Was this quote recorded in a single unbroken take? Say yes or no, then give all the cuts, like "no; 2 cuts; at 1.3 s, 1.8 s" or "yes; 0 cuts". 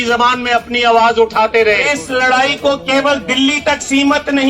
no; 1 cut; at 1.9 s